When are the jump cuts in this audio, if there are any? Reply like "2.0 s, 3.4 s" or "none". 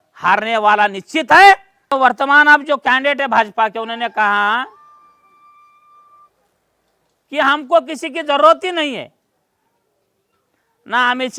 1.9 s